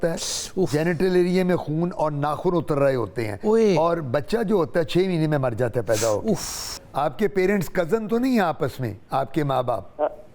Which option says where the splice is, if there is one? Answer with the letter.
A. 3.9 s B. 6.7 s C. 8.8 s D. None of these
B